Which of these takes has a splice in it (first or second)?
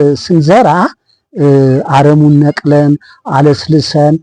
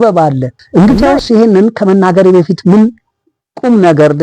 second